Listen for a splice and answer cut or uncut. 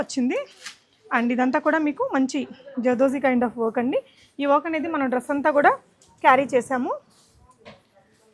uncut